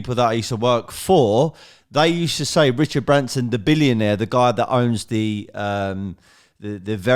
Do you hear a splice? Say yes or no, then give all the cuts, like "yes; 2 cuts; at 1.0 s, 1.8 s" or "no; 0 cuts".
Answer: no; 0 cuts